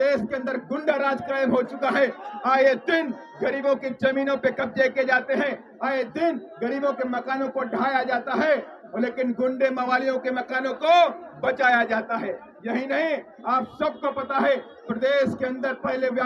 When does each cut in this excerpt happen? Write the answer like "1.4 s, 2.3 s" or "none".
none